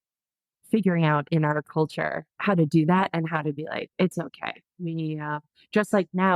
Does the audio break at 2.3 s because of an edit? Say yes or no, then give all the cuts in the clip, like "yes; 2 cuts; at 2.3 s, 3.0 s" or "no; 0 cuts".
yes; 1 cut; at 2.3 s